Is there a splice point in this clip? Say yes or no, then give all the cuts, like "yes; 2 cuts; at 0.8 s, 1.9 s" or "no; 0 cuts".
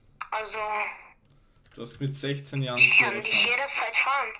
no; 0 cuts